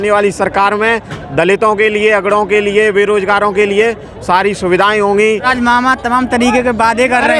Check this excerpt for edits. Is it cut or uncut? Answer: cut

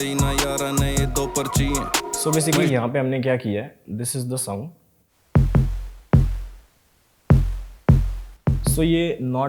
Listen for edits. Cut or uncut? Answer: uncut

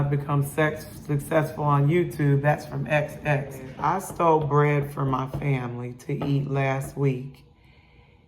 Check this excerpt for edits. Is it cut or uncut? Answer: cut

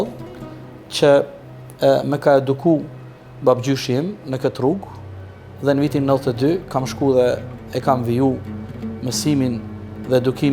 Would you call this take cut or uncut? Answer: uncut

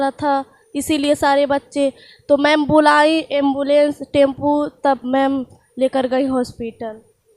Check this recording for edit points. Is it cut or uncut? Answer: uncut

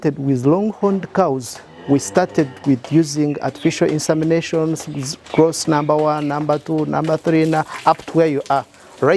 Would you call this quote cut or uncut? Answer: uncut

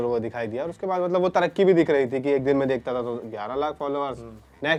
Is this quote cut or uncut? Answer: uncut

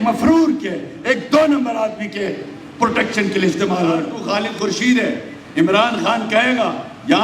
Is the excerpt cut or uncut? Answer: cut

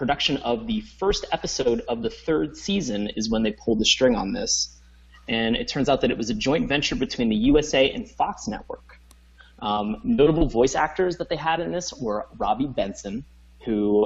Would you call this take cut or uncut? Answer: uncut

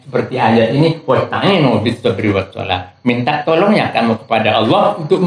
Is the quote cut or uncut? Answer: uncut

